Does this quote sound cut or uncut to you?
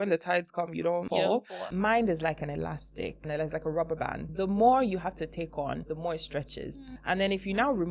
cut